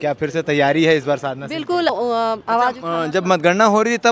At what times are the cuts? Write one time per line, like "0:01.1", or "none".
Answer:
0:01.9

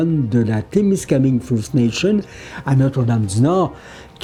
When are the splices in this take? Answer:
none

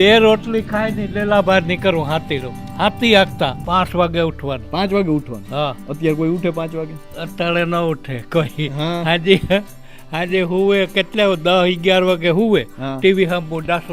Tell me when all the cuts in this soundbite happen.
0:03.6

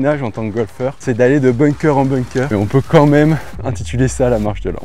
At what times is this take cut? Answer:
0:01.0
0:02.5

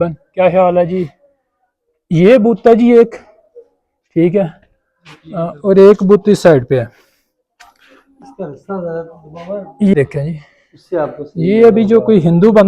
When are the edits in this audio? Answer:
0:09.9

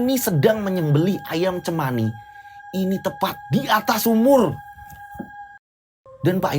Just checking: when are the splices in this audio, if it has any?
0:05.5

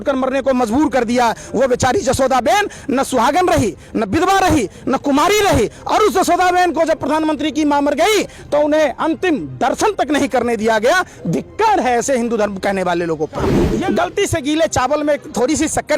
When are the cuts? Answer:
0:13.7

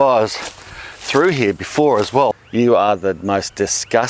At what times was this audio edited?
0:02.3

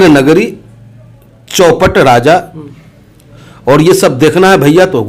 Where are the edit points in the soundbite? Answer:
none

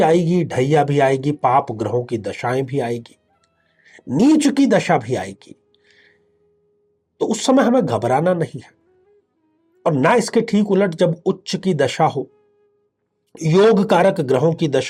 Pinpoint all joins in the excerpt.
none

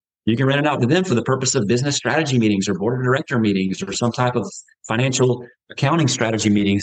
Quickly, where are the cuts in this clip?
none

